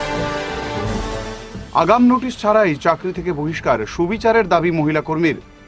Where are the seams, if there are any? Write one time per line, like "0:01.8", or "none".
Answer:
0:01.1